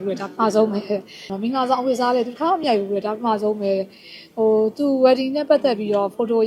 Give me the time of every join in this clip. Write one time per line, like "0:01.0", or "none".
0:01.3